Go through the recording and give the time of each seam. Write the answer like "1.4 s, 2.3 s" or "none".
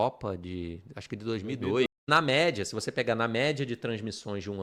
2.0 s